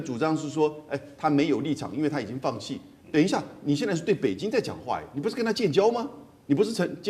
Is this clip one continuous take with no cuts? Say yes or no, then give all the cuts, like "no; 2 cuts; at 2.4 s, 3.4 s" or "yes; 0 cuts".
yes; 0 cuts